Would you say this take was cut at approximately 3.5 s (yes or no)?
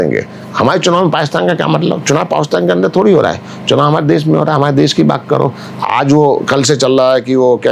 no